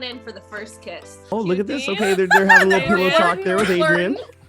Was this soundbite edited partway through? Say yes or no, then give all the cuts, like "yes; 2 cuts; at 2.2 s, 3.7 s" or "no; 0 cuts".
yes; 1 cut; at 1.3 s